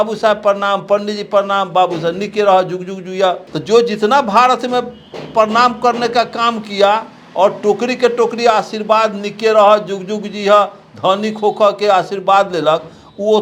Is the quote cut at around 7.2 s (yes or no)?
no